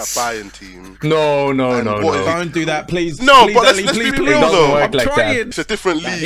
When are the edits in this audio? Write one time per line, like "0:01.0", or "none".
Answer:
0:04.1
0:05.5